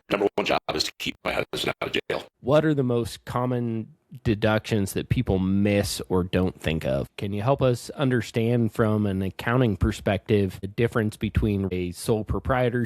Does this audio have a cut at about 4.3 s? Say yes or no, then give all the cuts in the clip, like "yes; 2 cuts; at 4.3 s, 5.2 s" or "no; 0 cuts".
no; 4 cuts; at 2.3 s, 7.2 s, 10.7 s, 11.7 s